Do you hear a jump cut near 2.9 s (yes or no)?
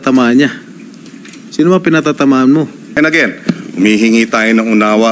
yes